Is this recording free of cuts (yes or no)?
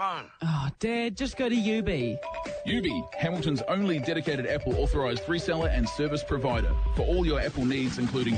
yes